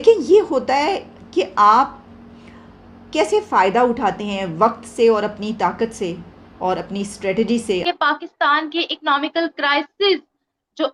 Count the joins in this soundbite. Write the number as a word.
one